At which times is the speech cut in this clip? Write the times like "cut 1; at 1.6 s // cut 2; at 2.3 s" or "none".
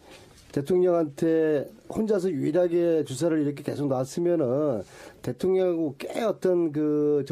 cut 1; at 2.8 s